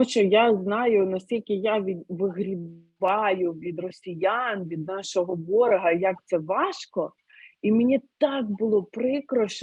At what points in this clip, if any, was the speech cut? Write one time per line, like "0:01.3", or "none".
none